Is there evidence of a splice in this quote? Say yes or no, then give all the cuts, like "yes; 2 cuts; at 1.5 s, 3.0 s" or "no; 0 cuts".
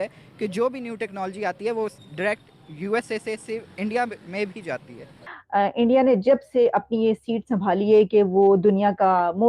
yes; 1 cut; at 5.3 s